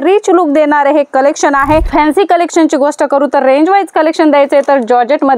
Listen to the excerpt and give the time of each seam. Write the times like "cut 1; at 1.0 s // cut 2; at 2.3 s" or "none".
cut 1; at 1.9 s